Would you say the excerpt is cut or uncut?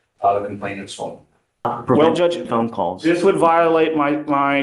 cut